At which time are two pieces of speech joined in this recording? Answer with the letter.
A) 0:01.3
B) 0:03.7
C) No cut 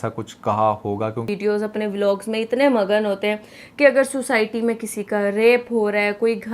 A